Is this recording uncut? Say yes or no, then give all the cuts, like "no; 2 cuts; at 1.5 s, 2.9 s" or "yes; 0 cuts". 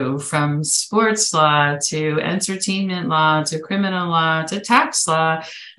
yes; 0 cuts